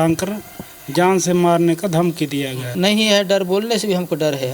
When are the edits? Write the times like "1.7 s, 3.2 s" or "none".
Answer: 2.6 s